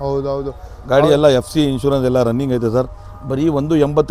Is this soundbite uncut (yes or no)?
yes